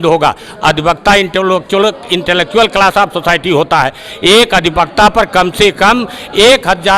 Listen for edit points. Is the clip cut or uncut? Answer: uncut